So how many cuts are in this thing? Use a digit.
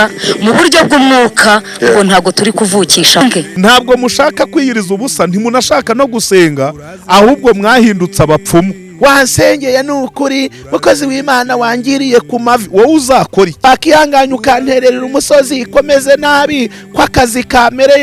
3